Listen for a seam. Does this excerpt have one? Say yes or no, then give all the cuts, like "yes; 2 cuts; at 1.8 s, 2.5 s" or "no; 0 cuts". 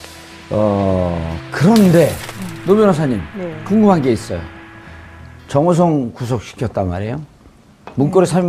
no; 0 cuts